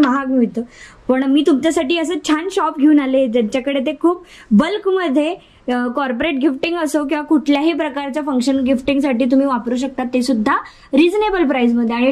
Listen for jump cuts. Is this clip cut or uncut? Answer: uncut